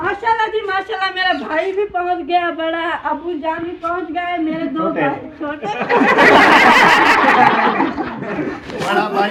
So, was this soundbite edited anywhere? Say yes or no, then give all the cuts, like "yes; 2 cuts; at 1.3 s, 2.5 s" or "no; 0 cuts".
no; 0 cuts